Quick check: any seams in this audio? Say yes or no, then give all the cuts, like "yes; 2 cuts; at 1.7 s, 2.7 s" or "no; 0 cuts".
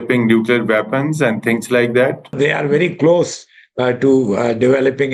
yes; 1 cut; at 2.4 s